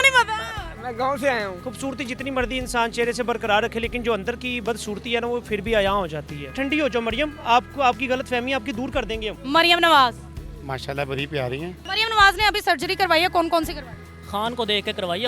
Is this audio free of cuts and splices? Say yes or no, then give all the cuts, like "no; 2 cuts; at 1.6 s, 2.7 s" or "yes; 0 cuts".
no; 4 cuts; at 1.6 s, 6.5 s, 9.3 s, 11.8 s